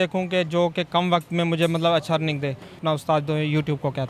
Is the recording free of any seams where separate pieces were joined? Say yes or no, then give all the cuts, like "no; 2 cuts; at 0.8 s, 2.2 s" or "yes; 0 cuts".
no; 1 cut; at 2.8 s